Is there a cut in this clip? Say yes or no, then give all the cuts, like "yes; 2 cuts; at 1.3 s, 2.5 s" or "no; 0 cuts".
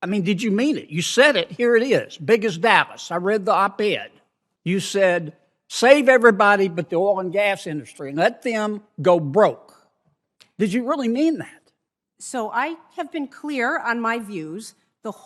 no; 0 cuts